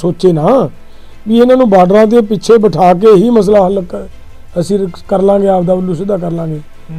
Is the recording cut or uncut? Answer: uncut